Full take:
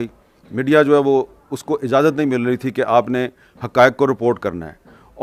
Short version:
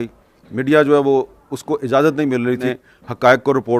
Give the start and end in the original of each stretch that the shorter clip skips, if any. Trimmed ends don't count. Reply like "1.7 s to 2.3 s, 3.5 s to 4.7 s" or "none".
2.7 s to 3.2 s